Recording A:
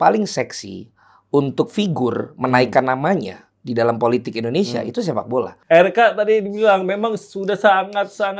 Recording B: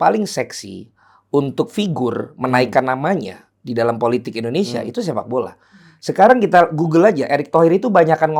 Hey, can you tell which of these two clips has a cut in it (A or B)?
A